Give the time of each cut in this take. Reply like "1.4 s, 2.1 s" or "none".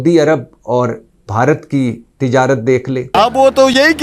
3.1 s